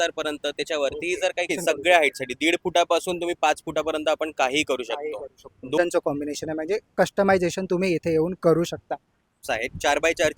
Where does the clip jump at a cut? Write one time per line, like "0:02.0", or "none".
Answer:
0:01.5
0:05.8
0:09.5